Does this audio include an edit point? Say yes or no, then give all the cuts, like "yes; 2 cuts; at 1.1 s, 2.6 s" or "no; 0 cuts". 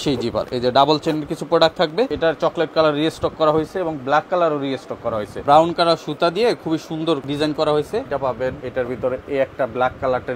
yes; 4 cuts; at 2.1 s, 5.4 s, 7.3 s, 8.5 s